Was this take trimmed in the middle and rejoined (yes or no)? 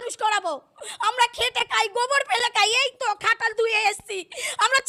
no